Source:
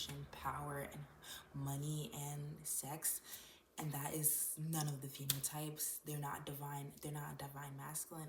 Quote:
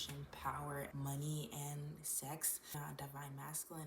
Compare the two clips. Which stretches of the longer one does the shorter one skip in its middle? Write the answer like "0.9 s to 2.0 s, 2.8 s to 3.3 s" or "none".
0.9 s to 1.5 s, 3.3 s to 7.1 s